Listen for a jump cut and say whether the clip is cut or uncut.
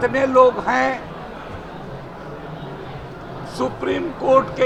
uncut